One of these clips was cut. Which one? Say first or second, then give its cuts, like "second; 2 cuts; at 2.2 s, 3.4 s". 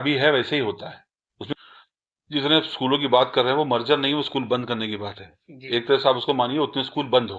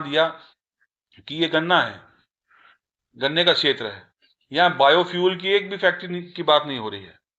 first; 1 cut; at 1.5 s